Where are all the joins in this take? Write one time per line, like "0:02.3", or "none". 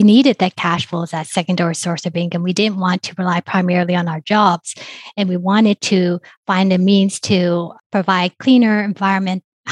none